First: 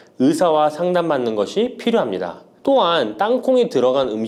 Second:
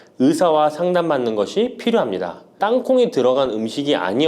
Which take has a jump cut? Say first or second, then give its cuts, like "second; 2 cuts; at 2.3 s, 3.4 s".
second; 1 cut; at 2.5 s